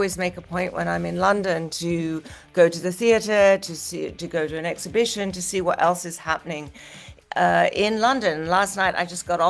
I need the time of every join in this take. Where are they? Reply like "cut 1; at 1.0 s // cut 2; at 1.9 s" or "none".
none